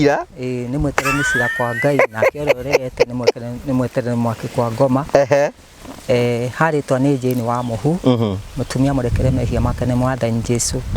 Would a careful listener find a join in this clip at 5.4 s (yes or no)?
no